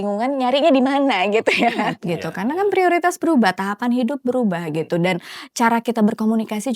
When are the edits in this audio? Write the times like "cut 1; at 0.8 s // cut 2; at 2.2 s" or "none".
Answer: cut 1; at 2.0 s